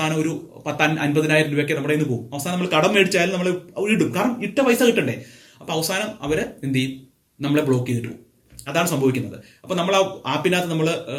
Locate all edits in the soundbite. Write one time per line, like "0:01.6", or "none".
none